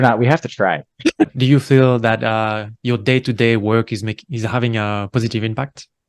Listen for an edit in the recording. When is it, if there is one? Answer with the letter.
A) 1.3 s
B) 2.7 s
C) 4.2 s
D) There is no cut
A